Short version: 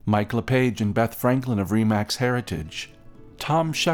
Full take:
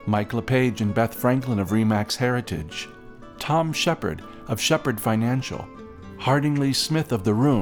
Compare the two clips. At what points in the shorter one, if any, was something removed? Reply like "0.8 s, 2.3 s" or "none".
none